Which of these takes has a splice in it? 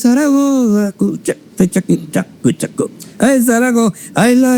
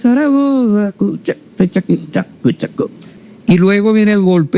second; 1 cut; at 3.0 s

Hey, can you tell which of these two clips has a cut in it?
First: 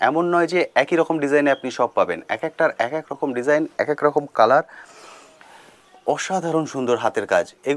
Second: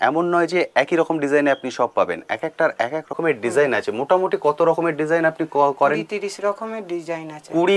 second; 1 cut; at 3.2 s

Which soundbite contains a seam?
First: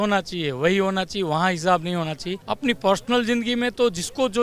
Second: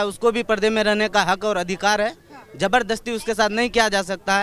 first; 1 cut; at 2.3 s

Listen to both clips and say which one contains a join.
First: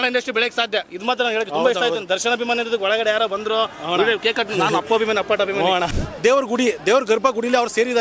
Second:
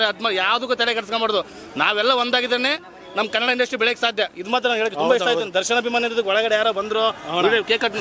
first; 1 cut; at 5.9 s

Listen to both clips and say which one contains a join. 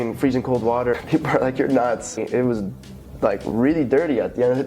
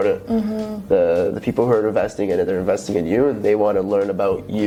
first; 2 cuts; at 1.0 s, 2.2 s

